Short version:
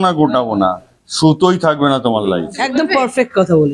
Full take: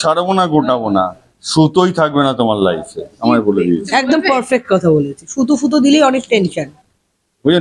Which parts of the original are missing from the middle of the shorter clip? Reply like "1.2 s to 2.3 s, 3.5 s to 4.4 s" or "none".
3.1 s to 4.1 s